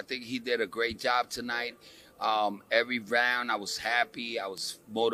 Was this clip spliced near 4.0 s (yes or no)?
no